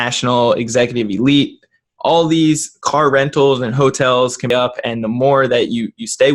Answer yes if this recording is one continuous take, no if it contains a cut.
no